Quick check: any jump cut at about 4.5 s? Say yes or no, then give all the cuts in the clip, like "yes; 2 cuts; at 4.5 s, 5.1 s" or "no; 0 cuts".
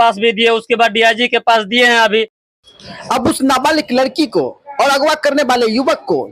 no; 1 cut; at 2.4 s